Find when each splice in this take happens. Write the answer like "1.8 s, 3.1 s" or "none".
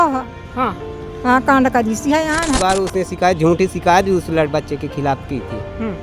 2.6 s